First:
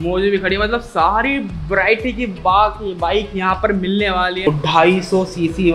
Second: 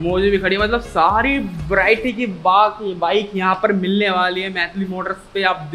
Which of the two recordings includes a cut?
first; 1 cut; at 4.5 s

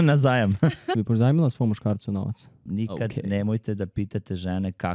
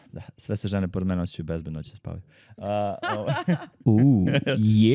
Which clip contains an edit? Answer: first; 2 cuts; at 0.8 s, 2.7 s

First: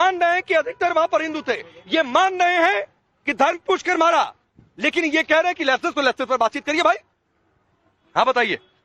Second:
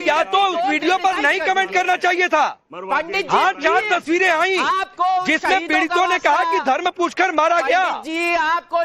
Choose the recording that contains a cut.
second; 1 cut; at 3.6 s

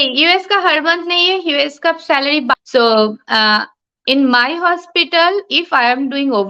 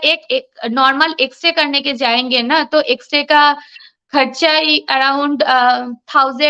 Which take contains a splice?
first; 1 cut; at 2.6 s

